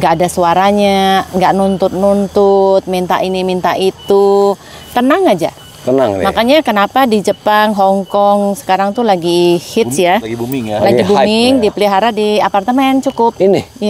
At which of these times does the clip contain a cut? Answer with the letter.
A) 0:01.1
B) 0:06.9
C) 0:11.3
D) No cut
D